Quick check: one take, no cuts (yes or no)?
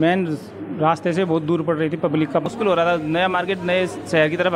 no